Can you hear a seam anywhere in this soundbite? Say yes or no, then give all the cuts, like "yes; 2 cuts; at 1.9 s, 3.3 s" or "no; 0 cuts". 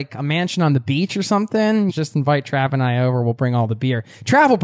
yes; 1 cut; at 1.9 s